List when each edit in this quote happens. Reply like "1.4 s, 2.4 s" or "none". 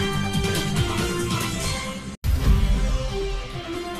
none